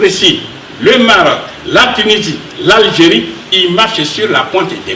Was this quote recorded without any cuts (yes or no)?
yes